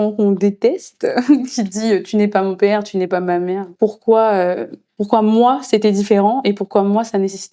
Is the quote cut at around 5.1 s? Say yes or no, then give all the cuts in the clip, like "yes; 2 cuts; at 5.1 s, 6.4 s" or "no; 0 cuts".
no; 1 cut; at 3.7 s